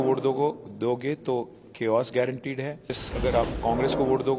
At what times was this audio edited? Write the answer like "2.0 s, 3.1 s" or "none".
3.1 s